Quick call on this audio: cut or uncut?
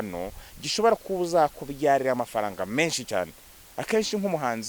uncut